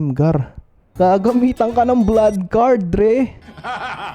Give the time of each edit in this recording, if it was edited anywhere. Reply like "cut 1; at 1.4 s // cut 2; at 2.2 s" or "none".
cut 1; at 0.9 s